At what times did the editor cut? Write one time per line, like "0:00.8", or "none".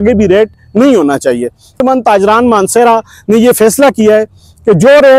0:01.8